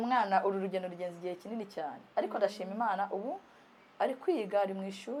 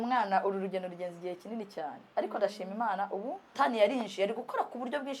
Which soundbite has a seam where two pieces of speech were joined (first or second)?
second